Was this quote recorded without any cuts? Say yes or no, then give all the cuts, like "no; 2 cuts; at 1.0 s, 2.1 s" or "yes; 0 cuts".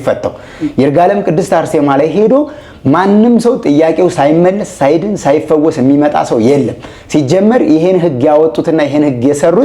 yes; 0 cuts